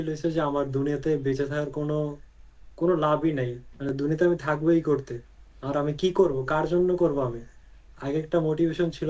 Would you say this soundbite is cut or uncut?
uncut